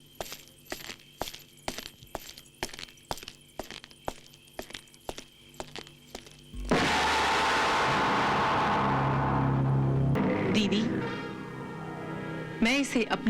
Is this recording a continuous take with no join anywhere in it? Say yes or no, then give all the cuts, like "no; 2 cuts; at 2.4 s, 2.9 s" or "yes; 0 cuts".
no; 1 cut; at 10.2 s